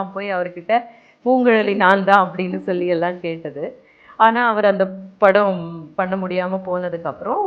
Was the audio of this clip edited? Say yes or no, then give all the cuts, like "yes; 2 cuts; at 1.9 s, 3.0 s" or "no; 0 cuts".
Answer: no; 0 cuts